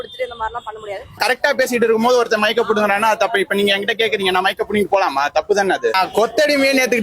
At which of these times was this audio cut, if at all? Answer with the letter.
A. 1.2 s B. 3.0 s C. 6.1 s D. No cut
A